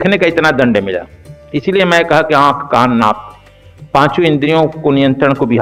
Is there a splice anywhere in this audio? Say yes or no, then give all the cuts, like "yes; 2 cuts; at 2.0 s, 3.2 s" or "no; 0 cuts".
no; 0 cuts